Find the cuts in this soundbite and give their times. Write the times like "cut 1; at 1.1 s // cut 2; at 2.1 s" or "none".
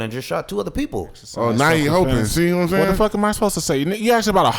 cut 1; at 1.2 s